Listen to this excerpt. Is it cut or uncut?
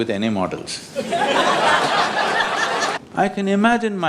cut